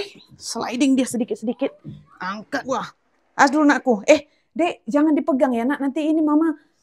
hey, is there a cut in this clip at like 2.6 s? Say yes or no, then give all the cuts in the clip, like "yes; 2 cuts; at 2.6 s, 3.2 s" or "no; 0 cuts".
yes; 1 cut; at 2.6 s